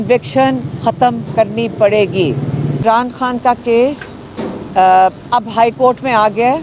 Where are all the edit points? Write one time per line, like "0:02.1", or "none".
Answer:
0:02.8